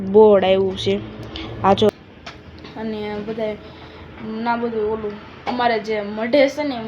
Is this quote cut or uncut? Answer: cut